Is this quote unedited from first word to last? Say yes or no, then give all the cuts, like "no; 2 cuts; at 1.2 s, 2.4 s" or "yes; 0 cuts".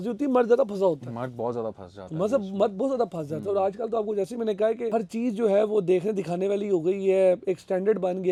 yes; 0 cuts